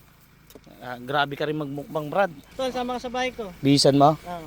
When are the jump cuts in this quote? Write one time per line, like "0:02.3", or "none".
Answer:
0:02.4